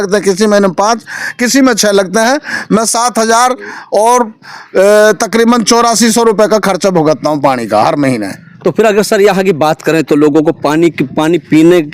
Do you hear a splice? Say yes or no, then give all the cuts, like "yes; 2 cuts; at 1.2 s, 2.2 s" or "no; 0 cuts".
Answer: no; 0 cuts